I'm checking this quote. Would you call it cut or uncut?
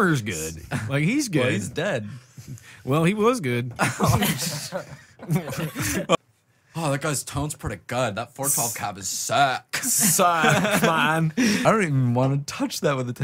cut